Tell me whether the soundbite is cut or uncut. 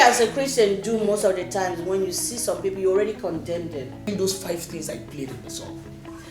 cut